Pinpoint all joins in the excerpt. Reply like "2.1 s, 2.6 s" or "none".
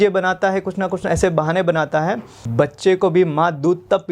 2.5 s